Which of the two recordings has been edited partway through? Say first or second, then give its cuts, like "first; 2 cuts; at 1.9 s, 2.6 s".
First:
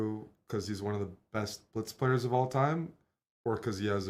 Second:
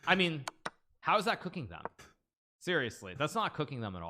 second; 1 cut; at 1.5 s